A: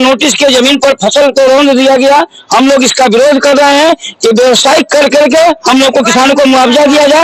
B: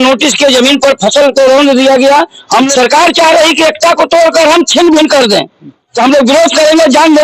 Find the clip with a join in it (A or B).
B